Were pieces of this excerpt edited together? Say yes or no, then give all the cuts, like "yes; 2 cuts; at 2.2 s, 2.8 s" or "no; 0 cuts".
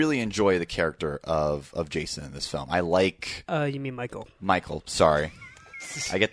no; 0 cuts